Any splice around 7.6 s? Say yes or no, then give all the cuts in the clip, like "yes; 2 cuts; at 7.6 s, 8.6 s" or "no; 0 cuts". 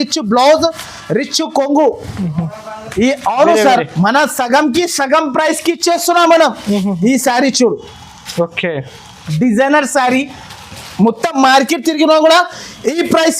no; 1 cut; at 2.9 s